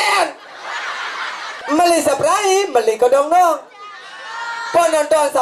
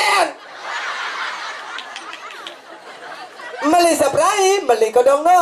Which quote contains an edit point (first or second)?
first